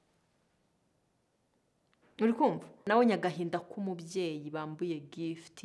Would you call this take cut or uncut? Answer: cut